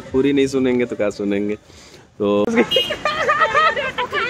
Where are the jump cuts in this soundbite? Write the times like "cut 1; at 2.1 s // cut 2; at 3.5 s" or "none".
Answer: cut 1; at 2.5 s